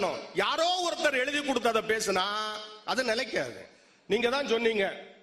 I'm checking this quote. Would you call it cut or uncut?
uncut